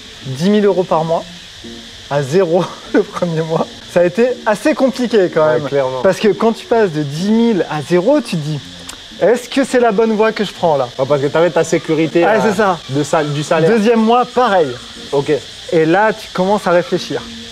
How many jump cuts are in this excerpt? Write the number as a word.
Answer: zero